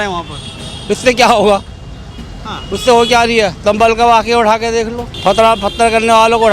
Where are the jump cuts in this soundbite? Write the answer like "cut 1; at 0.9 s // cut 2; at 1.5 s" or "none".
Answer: cut 1; at 3.6 s // cut 2; at 5.1 s